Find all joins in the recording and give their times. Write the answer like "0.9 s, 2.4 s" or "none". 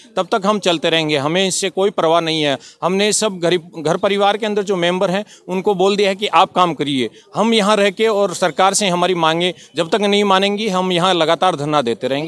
none